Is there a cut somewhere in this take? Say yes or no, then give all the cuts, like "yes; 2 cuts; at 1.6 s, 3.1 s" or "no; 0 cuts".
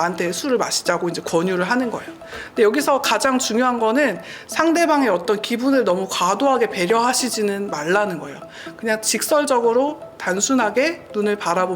no; 0 cuts